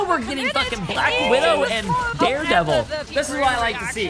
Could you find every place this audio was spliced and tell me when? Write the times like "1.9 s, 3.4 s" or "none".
2.1 s, 3.1 s